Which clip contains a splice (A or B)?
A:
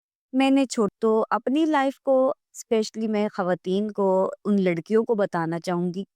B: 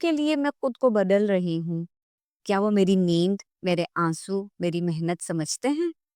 A